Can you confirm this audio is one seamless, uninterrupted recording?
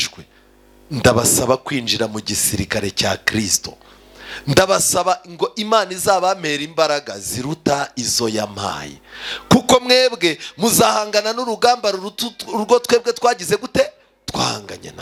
yes; 0 cuts

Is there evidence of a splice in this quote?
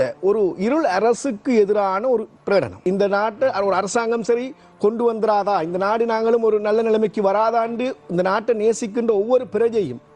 yes; 1 cut; at 2.7 s

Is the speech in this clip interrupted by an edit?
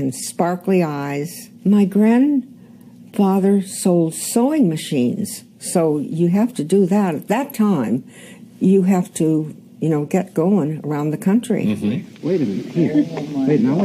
yes; 1 cut; at 11.6 s

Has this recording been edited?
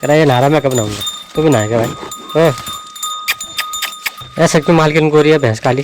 yes; 1 cut; at 4.2 s

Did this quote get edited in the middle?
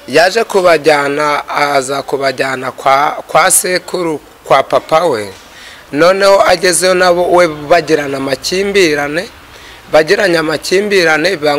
no; 0 cuts

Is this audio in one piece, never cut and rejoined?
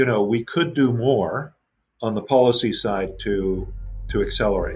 yes; 0 cuts

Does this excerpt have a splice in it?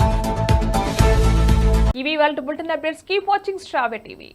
no; 0 cuts

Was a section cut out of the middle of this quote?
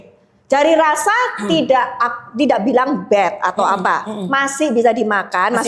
no; 0 cuts

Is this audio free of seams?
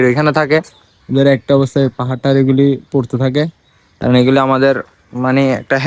yes; 0 cuts

